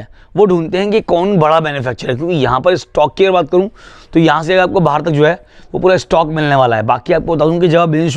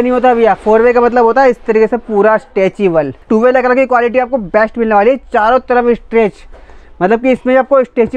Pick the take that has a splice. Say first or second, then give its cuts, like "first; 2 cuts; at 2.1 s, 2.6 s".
second; 1 cut; at 3.2 s